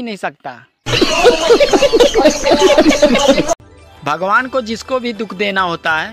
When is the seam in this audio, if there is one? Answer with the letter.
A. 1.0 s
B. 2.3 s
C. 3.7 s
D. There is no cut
D